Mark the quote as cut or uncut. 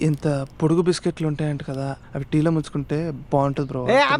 uncut